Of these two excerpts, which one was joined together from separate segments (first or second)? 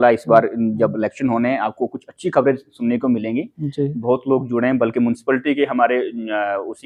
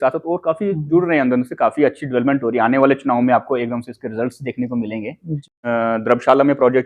second